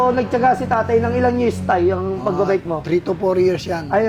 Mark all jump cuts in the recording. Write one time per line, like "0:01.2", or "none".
none